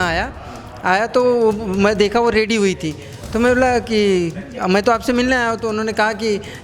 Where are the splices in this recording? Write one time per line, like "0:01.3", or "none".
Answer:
none